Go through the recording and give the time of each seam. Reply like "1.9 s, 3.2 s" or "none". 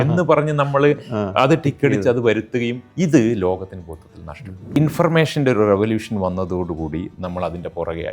2.8 s, 4.8 s

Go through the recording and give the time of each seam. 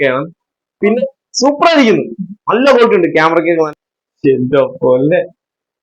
1.0 s, 3.7 s

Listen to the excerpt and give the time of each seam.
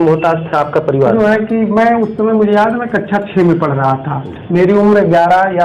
1.1 s

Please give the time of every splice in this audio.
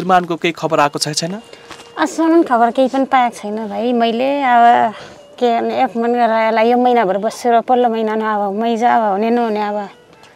none

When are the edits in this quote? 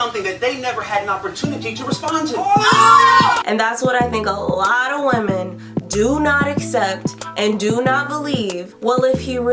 3.4 s, 8.7 s

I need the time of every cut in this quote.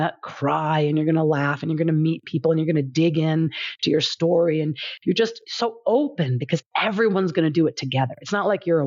none

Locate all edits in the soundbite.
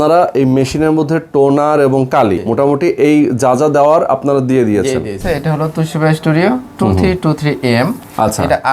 2.4 s, 5.2 s

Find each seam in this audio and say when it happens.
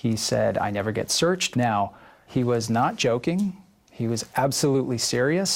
1.4 s

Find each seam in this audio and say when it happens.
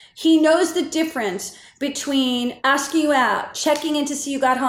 3.5 s

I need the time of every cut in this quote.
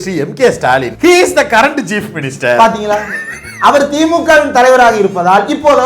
0.9 s

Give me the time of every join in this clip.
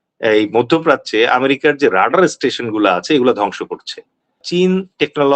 4.4 s

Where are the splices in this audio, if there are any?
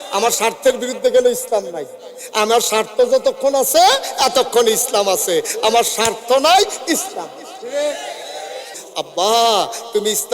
8.8 s

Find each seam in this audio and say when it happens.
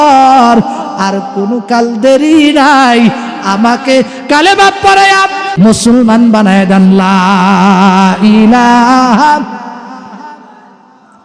5.5 s

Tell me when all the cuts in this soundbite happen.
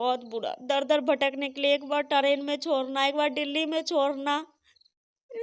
none

